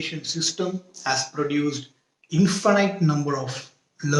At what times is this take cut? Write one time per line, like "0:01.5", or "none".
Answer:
none

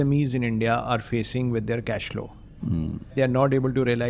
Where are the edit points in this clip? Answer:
0:03.1

